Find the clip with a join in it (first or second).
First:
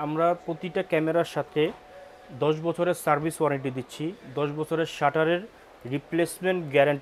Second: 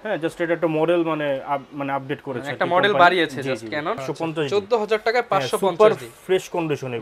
second